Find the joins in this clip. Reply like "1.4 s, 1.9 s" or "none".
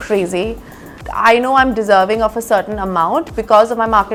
none